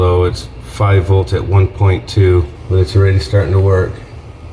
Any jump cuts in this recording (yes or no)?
yes